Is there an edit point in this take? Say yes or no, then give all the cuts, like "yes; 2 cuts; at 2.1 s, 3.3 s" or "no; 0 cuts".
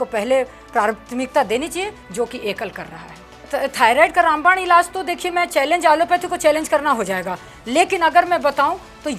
yes; 1 cut; at 3.5 s